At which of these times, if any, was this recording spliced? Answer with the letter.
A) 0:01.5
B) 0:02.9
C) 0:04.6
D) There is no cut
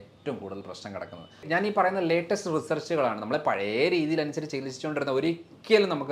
A